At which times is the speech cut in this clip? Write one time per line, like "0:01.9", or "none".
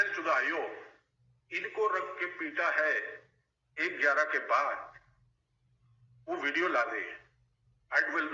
none